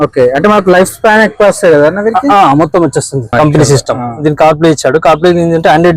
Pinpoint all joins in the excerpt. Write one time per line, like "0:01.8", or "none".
0:03.3